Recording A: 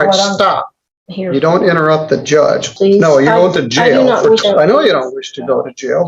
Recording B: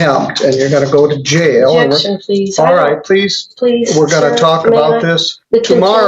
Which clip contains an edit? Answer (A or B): A